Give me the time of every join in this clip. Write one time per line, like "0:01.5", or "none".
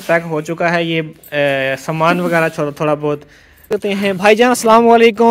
0:03.6